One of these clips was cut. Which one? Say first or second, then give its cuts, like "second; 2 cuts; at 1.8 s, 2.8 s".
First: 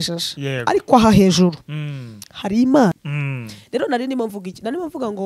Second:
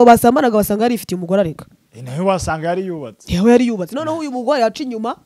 first; 1 cut; at 3.1 s